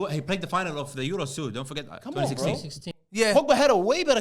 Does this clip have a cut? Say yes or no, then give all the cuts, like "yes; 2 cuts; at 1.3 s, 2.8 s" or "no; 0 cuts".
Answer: no; 0 cuts